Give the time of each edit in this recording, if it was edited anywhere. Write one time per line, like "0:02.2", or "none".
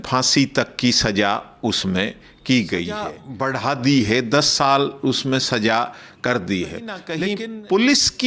0:03.2
0:07.1